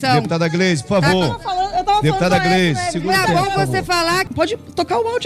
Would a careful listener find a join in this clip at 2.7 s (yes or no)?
no